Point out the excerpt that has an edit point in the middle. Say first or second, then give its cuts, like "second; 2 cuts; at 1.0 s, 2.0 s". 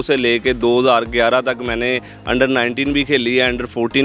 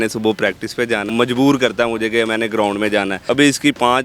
second; 2 cuts; at 1.0 s, 3.2 s